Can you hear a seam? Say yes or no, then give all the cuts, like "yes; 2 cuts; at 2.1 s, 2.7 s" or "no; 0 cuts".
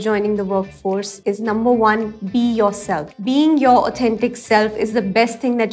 yes; 2 cuts; at 1.1 s, 3.1 s